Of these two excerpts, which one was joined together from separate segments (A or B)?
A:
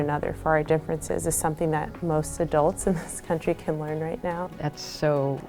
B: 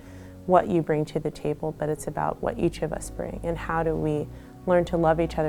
A